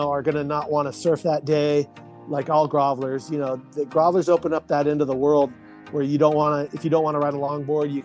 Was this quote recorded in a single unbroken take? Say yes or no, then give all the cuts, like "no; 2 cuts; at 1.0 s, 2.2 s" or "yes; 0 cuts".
yes; 0 cuts